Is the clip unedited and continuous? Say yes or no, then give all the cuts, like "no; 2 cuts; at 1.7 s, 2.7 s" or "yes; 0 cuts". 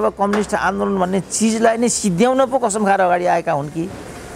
yes; 0 cuts